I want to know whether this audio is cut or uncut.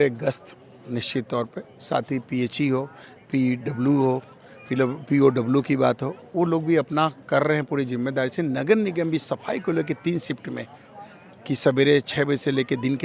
uncut